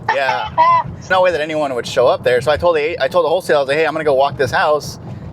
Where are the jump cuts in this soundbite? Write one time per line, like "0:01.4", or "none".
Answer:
0:01.1